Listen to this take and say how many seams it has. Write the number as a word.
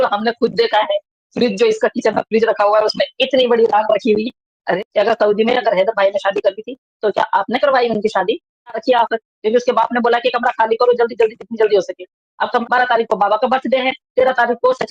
three